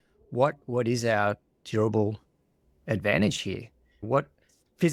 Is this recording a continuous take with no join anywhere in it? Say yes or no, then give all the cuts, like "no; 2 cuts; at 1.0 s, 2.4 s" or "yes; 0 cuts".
yes; 0 cuts